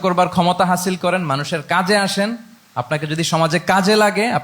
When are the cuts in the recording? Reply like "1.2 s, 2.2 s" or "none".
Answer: none